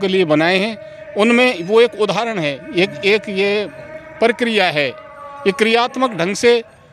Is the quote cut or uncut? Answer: uncut